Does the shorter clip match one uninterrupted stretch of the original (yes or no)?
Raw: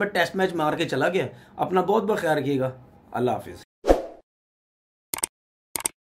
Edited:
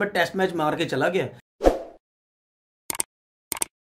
no